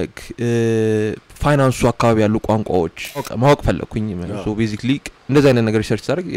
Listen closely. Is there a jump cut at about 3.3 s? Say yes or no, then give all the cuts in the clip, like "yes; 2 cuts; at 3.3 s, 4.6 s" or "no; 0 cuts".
yes; 1 cut; at 3.3 s